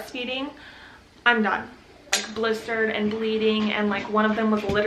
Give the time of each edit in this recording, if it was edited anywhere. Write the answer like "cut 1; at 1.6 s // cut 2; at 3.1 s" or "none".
cut 1; at 2.2 s